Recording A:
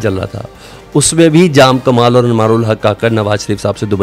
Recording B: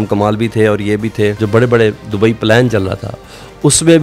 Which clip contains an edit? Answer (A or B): B